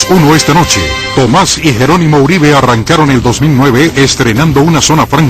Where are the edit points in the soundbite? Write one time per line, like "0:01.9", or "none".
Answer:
0:03.6